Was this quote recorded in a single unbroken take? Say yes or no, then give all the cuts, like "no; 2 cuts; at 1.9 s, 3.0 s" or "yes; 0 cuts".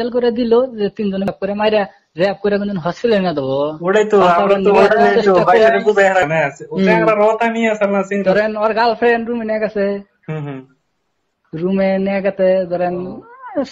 no; 1 cut; at 1.3 s